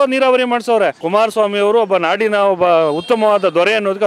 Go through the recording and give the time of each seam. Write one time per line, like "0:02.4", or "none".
0:01.0